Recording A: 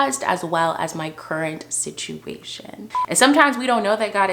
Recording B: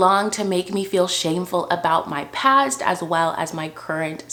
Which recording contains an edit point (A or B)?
A